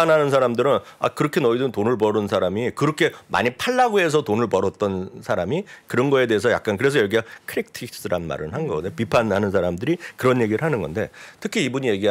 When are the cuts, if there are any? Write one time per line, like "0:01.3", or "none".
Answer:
none